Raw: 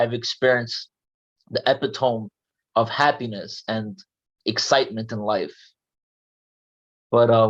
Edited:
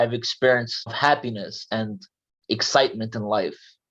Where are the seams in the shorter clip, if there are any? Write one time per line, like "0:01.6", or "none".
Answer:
0:00.9